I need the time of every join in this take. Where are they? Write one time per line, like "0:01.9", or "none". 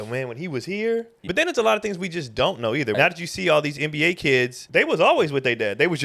0:01.3
0:03.0
0:04.6